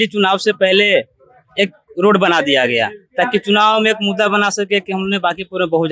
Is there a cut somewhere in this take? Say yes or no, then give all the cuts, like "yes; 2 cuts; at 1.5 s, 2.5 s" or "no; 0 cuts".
no; 0 cuts